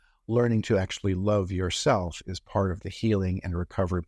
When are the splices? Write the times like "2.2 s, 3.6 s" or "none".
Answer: none